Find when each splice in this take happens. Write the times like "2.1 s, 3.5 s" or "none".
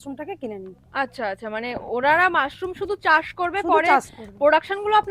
none